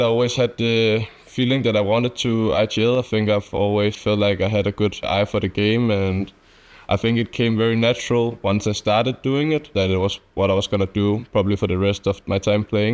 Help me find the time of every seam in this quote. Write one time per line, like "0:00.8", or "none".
0:05.1
0:09.7